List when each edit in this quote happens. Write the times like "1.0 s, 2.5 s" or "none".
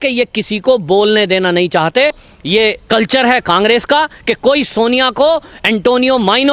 2.3 s